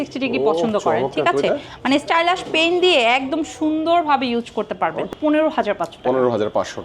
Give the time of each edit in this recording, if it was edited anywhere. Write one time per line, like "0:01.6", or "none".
0:05.1